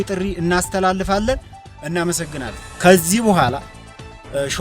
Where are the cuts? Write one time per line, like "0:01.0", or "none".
0:02.7